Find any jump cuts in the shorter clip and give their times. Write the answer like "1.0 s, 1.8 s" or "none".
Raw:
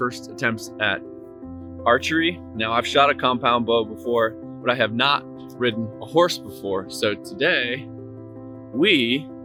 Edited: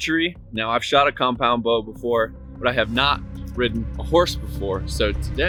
none